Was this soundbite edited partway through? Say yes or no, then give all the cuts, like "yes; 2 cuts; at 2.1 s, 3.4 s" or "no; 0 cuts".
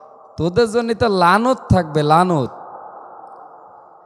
no; 0 cuts